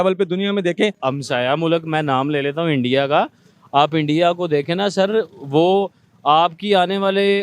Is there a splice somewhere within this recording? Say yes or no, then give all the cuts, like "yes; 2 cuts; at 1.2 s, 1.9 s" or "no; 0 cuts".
yes; 1 cut; at 1.0 s